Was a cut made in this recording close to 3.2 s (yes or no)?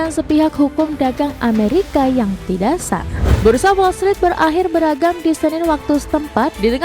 yes